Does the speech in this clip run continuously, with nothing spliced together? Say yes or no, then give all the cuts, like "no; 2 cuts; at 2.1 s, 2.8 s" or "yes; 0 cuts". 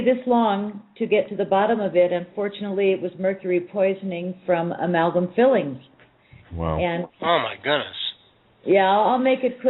no; 1 cut; at 4.2 s